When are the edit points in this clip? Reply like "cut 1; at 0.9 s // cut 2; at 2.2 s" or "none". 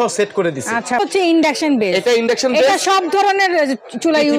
cut 1; at 1.0 s